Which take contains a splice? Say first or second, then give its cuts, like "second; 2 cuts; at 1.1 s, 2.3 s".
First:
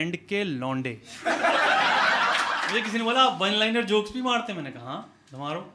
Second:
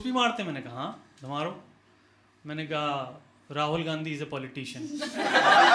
first; 1 cut; at 2.6 s